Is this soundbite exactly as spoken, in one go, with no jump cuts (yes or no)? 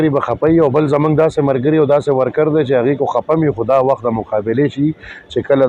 yes